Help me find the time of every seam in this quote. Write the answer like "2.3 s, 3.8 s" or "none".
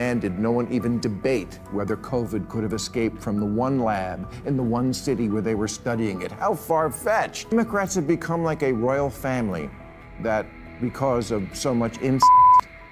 none